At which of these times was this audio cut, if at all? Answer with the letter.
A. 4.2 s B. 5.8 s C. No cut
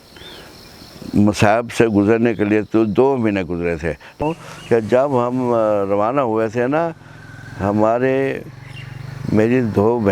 A